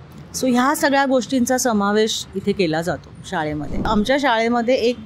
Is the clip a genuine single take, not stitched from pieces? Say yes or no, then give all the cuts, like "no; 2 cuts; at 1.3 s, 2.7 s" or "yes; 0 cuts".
no; 1 cut; at 3.9 s